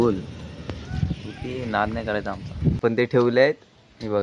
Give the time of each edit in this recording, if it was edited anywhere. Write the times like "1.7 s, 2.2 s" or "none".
2.8 s